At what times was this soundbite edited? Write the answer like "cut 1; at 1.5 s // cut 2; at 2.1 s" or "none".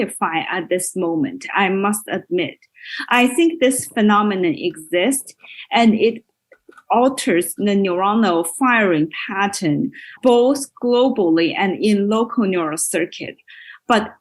none